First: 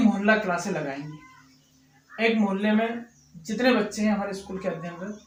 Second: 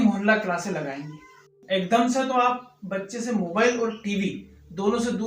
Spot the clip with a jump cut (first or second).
second